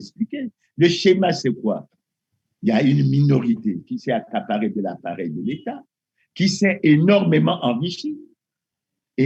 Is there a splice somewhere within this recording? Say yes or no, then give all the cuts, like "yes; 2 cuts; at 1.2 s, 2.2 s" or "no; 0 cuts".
no; 0 cuts